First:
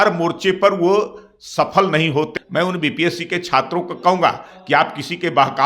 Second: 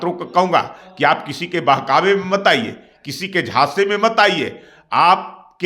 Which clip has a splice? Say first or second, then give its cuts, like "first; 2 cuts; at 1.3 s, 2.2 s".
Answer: first; 1 cut; at 2.3 s